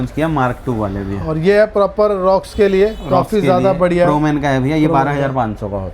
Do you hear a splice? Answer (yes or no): no